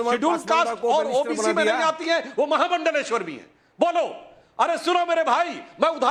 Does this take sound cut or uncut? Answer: uncut